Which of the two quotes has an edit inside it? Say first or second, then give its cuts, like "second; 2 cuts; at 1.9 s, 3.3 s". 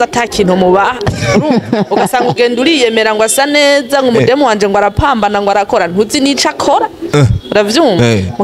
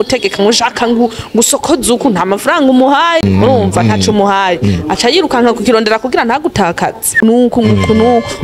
second; 2 cuts; at 3.2 s, 7.2 s